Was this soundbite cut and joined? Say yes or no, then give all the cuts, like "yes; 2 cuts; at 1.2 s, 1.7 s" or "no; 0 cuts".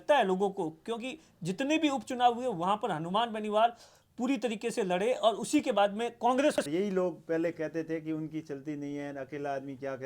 yes; 1 cut; at 6.6 s